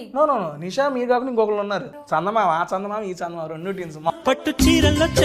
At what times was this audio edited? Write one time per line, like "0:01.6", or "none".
0:01.9
0:04.1